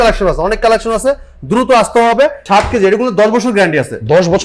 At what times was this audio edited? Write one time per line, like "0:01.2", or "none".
0:02.4